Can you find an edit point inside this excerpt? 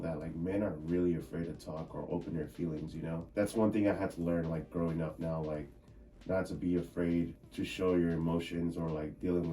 yes; 2 cuts; at 3.3 s, 7.4 s

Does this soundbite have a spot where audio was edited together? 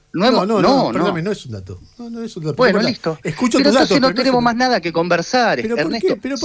no; 0 cuts

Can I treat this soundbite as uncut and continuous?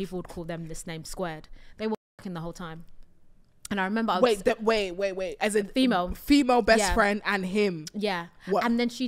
yes; 0 cuts

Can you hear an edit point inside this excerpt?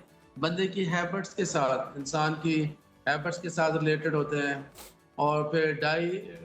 no; 0 cuts

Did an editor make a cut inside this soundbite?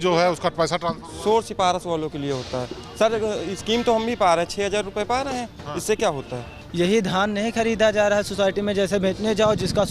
yes; 1 cut; at 6.6 s

